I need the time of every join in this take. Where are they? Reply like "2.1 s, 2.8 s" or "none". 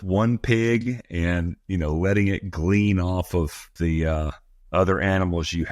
3.7 s